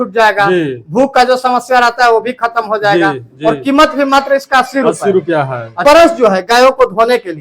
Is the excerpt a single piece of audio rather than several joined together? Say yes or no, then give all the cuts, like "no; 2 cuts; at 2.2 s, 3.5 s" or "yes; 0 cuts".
no; 1 cut; at 5.8 s